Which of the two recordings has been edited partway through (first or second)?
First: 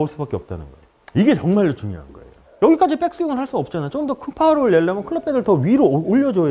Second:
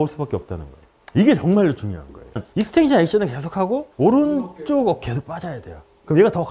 second